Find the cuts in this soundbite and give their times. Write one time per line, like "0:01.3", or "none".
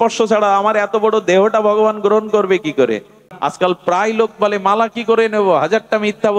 0:03.2